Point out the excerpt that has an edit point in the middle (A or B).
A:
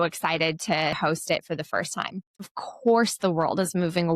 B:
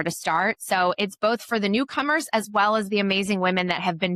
A